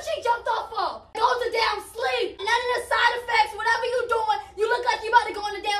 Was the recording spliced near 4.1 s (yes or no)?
no